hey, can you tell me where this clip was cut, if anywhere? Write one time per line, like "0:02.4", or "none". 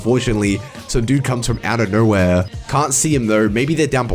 0:02.6